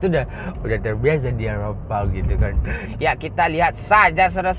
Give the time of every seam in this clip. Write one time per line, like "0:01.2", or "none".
0:02.8

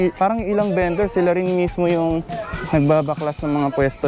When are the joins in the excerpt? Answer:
none

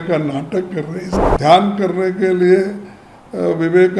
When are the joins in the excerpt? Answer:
0:01.1

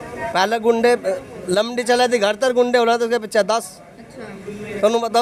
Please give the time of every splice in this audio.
none

